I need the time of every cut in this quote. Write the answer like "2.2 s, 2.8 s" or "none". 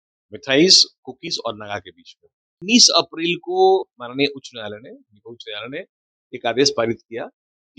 2.5 s